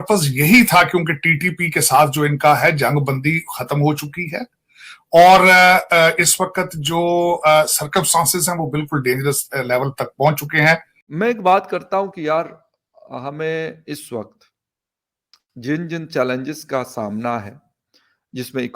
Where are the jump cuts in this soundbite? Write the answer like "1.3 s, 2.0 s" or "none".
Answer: 11.0 s